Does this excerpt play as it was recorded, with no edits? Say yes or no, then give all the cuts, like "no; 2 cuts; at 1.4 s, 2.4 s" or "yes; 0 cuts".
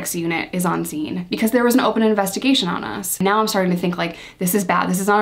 no; 1 cut; at 3.2 s